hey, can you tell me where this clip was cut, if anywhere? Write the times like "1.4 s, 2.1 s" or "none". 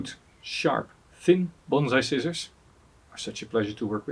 none

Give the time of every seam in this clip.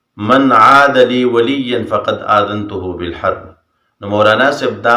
3.5 s

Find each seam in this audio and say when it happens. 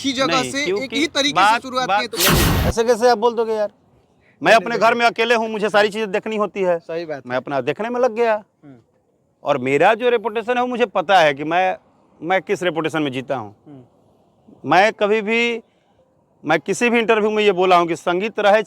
2.5 s

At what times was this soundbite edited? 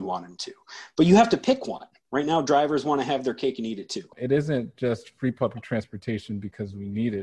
4.1 s

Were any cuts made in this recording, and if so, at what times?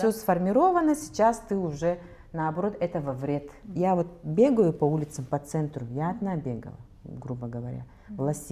3.6 s

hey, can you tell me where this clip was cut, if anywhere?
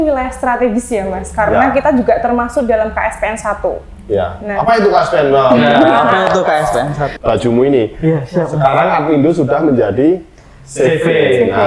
7.0 s

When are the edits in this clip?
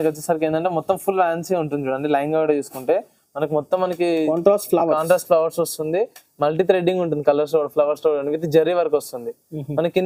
none

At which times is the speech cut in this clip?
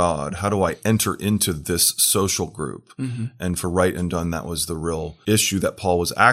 5.1 s

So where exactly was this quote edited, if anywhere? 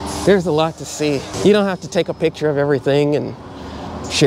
1.3 s

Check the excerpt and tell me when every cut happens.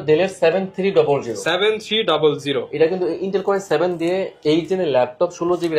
none

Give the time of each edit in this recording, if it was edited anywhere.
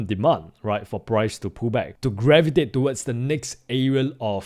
1.9 s

